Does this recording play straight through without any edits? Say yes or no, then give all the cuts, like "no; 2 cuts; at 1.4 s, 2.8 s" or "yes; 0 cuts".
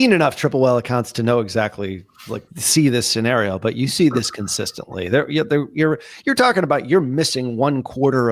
yes; 0 cuts